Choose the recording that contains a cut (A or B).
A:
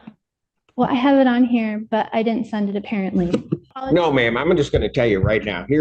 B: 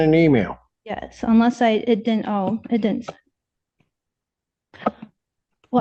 A